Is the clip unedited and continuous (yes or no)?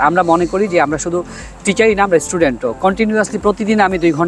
yes